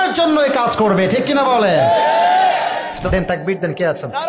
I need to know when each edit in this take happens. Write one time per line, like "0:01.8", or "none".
0:03.0